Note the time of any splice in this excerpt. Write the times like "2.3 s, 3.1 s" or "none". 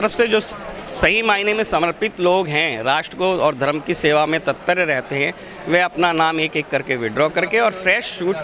none